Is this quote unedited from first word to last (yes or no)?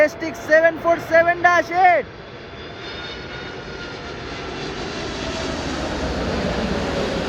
yes